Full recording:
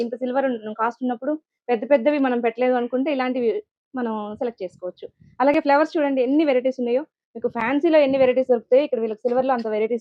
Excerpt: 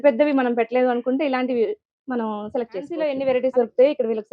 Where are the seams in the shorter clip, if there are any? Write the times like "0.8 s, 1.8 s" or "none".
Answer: 3.0 s